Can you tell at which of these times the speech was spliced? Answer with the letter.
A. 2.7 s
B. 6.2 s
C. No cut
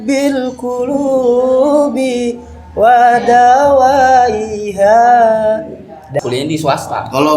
B